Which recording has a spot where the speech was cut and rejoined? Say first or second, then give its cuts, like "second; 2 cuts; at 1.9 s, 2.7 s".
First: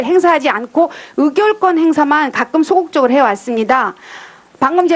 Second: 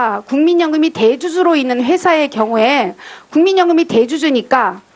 first; 1 cut; at 1.4 s